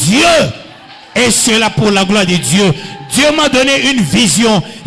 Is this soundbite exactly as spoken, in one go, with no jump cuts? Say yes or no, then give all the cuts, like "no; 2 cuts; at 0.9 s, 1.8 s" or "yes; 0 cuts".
yes; 0 cuts